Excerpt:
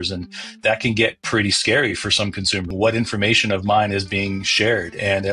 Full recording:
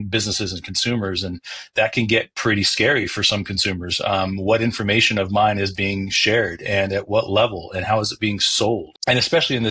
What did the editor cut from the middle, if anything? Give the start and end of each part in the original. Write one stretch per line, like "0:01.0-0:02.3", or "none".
0:03.8-0:04.4